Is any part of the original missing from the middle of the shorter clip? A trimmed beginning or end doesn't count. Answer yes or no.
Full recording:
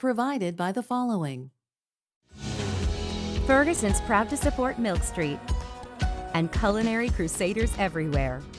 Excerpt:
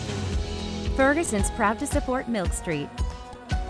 no